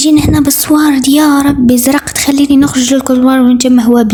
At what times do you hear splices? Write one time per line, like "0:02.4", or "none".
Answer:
none